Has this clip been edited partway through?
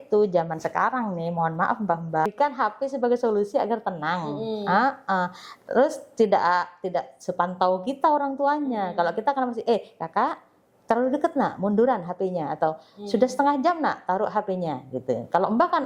yes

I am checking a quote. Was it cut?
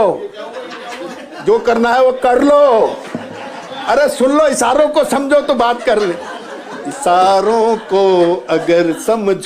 no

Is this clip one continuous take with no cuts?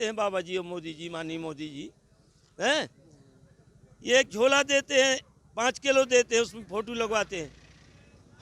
yes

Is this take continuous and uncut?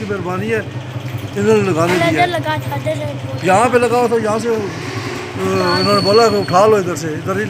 yes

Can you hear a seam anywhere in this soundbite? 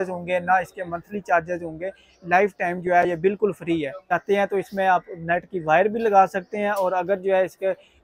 yes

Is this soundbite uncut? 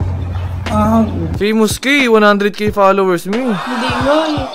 no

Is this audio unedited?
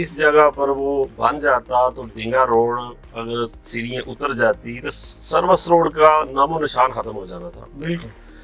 yes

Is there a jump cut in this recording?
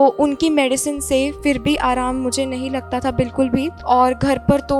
yes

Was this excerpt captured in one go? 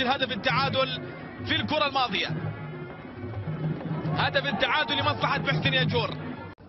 yes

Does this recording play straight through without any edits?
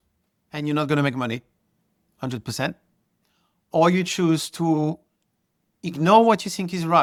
yes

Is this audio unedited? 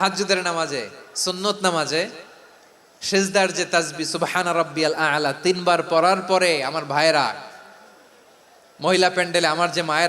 yes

